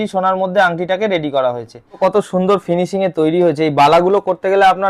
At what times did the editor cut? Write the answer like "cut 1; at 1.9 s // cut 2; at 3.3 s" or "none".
cut 1; at 2.0 s